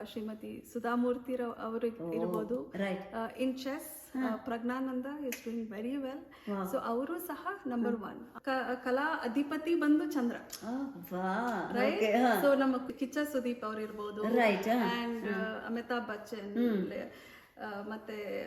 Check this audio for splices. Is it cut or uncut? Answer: cut